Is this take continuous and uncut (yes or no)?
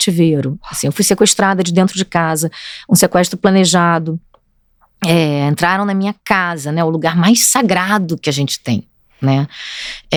yes